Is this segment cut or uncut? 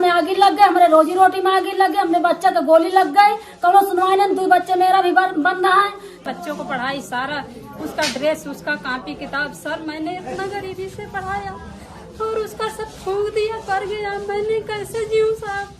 cut